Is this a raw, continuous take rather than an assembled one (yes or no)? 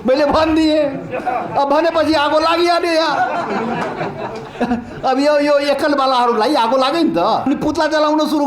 no